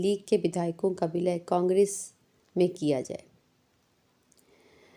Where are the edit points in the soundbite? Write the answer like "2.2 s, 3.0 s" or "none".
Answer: none

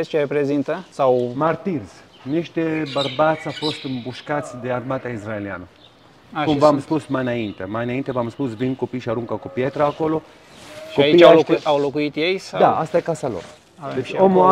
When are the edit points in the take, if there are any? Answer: none

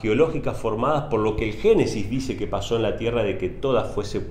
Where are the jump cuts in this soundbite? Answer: none

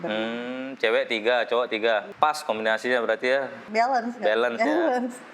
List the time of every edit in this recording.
2.1 s, 3.6 s

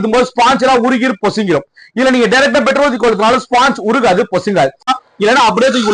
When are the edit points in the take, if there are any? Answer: 4.9 s

